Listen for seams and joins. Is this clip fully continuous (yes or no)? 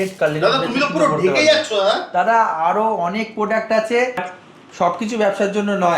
no